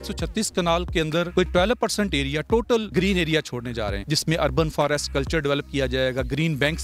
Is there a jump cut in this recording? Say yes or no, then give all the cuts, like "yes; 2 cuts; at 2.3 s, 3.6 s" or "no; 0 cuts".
yes; 3 cuts; at 1.1 s, 2.9 s, 4.0 s